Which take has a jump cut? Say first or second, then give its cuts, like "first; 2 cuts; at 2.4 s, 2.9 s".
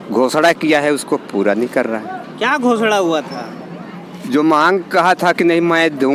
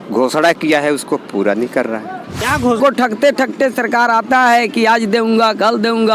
second; 1 cut; at 2.8 s